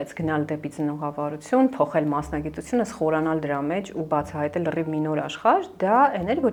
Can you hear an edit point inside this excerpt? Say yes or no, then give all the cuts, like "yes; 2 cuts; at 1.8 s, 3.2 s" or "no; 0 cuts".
no; 0 cuts